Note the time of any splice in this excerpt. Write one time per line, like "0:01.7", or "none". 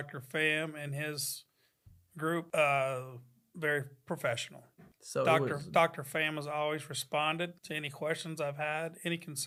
none